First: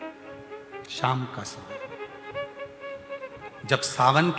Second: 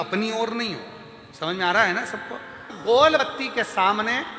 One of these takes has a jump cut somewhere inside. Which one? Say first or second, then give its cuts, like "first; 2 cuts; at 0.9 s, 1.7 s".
second; 1 cut; at 2.8 s